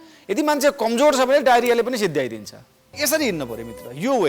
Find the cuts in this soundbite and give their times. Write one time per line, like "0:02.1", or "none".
0:03.0